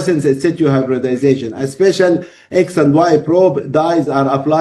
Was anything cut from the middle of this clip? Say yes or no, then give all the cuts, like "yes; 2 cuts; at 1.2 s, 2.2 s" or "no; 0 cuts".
no; 0 cuts